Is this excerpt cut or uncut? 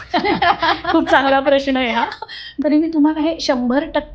cut